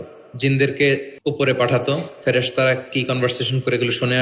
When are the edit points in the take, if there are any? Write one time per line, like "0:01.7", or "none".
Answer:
0:01.1